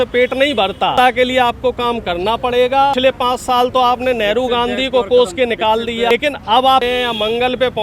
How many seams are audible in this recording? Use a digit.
4